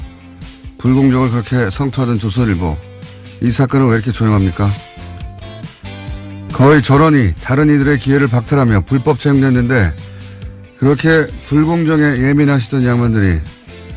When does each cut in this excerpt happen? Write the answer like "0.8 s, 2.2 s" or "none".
4.7 s